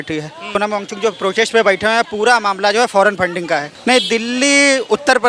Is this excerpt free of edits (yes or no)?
no